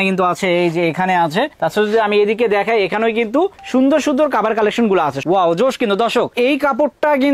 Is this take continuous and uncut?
no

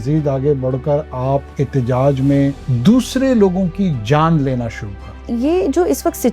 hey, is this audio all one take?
no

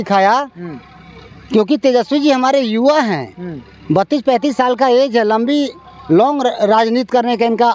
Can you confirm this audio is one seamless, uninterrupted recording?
yes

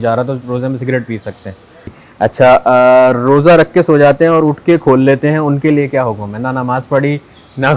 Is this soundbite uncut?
no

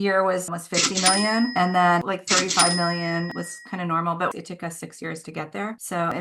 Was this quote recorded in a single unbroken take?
yes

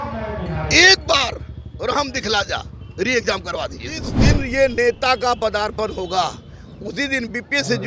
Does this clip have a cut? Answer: yes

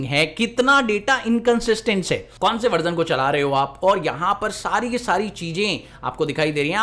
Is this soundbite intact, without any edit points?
no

